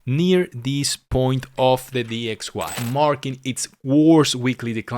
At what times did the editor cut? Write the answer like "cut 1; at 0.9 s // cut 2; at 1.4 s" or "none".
cut 1; at 2.7 s